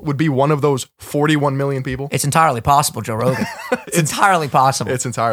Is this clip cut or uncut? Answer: uncut